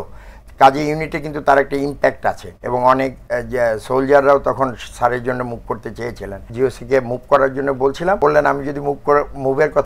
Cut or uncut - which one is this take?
cut